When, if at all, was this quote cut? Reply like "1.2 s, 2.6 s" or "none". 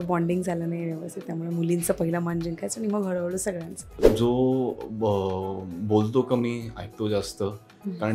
4.1 s

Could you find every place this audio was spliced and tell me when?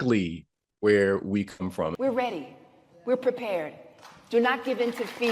1.9 s

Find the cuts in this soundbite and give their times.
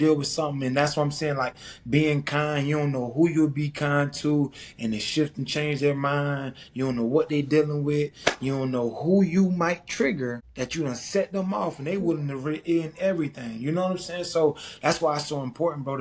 none

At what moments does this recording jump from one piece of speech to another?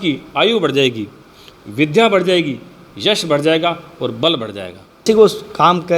5.0 s

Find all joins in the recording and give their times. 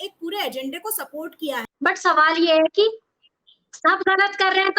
1.7 s

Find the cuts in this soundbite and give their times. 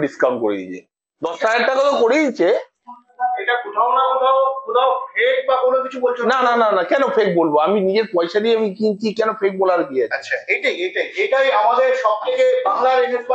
none

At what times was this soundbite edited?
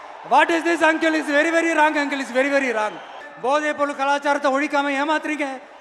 3.3 s

